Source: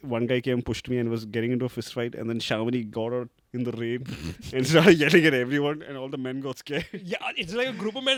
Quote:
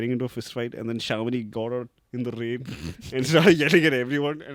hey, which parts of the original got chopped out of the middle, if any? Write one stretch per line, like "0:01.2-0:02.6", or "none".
none

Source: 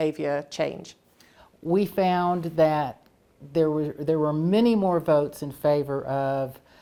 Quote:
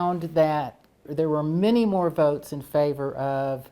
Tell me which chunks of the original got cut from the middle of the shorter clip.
0:03.3-0:03.9

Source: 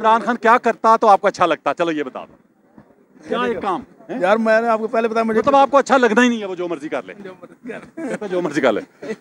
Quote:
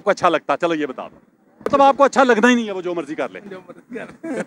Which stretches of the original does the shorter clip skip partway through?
0:02.9-0:05.4

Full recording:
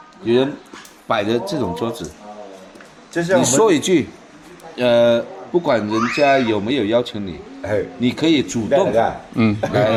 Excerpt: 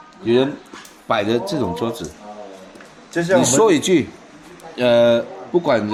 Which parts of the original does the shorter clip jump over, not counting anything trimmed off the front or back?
none

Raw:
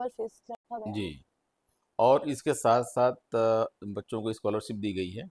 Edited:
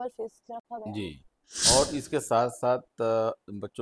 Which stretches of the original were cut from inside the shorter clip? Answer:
0:01.7-0:02.0

